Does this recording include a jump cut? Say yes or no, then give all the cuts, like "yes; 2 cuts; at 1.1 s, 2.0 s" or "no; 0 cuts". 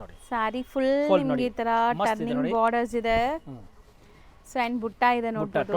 no; 0 cuts